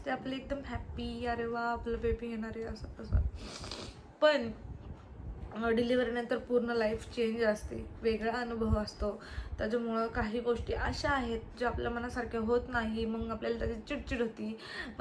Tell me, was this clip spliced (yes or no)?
no